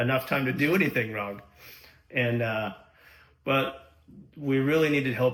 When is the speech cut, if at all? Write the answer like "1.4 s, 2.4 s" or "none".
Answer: none